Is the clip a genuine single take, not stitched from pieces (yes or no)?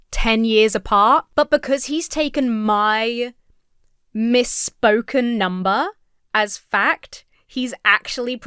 no